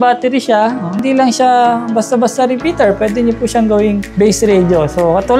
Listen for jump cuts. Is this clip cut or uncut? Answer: cut